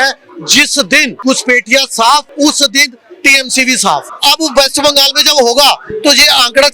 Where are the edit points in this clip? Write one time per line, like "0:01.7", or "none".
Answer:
0:01.1
0:02.3
0:04.1

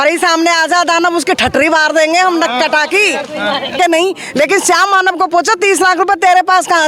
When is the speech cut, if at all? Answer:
0:03.8

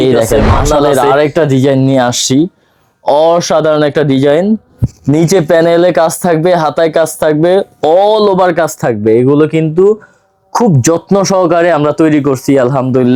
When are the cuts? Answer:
none

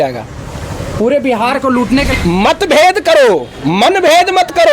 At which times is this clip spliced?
0:02.1

